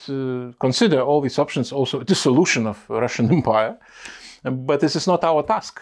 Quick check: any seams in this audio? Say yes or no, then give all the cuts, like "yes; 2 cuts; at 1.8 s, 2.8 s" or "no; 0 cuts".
no; 0 cuts